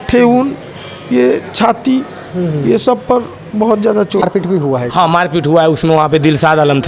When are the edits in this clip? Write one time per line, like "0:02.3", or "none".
0:04.3